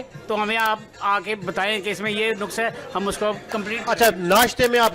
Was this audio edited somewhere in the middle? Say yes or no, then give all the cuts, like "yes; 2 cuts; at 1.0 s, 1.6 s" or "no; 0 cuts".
no; 0 cuts